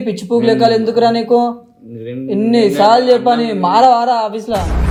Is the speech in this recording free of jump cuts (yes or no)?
yes